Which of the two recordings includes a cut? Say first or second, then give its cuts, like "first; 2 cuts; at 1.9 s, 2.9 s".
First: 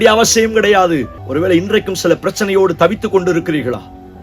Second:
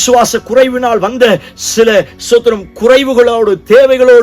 first; 1 cut; at 1.2 s